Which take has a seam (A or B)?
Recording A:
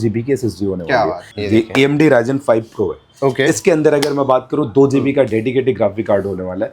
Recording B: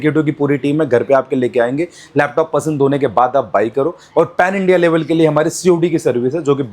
A